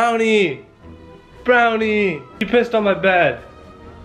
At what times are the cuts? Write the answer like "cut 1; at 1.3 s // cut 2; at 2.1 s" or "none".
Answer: cut 1; at 2.3 s